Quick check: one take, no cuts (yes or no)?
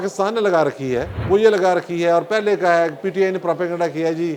no